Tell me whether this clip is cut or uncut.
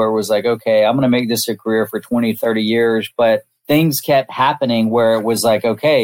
cut